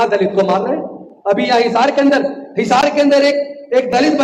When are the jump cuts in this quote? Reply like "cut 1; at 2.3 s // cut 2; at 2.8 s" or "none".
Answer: none